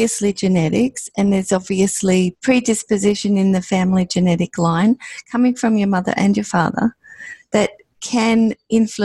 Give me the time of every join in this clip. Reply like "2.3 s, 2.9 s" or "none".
2.3 s